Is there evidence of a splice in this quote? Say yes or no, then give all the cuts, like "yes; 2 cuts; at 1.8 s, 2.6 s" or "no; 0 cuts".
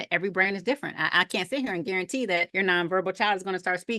yes; 1 cut; at 2.5 s